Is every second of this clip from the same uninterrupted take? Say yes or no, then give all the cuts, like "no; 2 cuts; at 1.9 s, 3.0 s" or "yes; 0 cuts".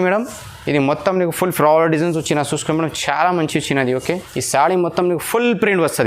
no; 1 cut; at 4.0 s